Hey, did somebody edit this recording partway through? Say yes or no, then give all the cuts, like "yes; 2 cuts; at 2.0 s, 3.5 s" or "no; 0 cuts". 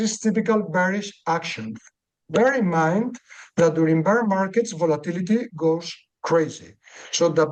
no; 0 cuts